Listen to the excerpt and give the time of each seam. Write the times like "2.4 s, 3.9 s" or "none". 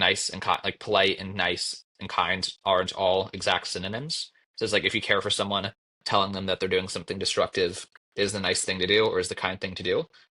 none